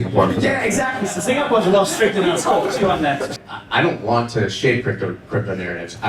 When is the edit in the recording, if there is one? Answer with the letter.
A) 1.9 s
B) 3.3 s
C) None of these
B